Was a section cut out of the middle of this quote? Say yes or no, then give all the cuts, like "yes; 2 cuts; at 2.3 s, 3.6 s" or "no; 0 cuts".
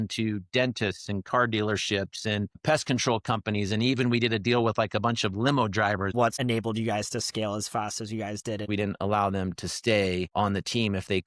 yes; 2 cuts; at 6.2 s, 8.6 s